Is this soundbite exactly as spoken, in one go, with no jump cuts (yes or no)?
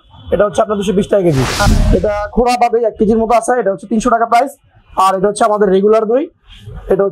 no